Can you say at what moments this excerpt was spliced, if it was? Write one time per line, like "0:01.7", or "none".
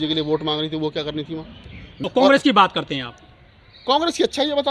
0:01.9